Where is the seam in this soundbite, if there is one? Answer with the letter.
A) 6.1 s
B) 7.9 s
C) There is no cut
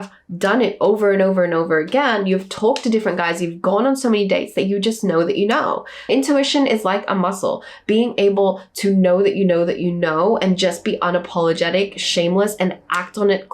A